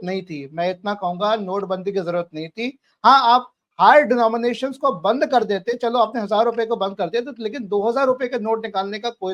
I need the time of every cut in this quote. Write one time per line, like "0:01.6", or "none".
none